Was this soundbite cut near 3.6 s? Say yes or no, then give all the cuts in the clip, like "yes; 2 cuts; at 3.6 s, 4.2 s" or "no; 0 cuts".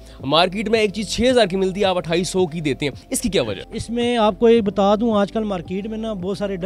yes; 1 cut; at 3.6 s